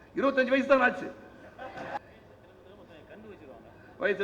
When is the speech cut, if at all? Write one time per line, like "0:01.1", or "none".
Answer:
0:02.0